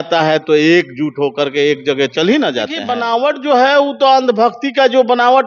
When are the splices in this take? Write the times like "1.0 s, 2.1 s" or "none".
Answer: 2.8 s